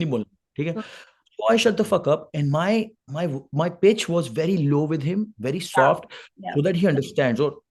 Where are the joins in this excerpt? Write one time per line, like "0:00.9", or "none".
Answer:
none